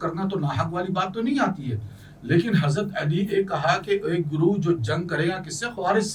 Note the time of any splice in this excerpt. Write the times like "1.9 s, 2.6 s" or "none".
none